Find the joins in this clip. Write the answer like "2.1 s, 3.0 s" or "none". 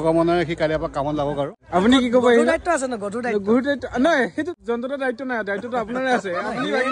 1.6 s, 4.5 s